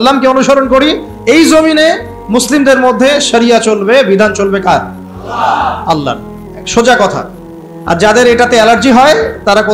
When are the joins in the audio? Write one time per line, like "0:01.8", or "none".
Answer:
none